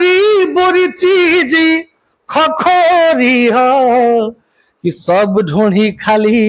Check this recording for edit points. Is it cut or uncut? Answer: uncut